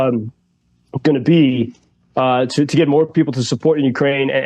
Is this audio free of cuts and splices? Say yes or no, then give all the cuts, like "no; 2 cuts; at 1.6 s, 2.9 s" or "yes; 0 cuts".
yes; 0 cuts